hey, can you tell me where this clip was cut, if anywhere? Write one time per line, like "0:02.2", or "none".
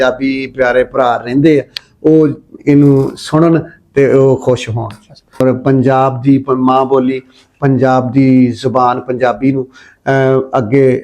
0:05.4